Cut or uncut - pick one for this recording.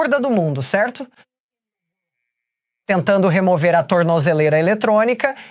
uncut